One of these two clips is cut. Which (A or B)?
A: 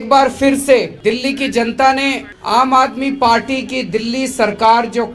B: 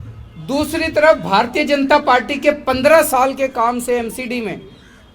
A